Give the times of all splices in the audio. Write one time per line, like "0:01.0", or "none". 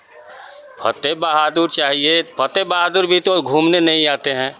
none